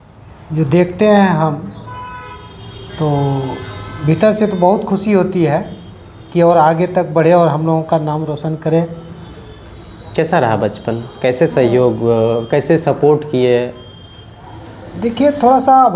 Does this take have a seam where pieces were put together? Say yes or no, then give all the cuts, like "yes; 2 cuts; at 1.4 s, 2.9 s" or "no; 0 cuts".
no; 0 cuts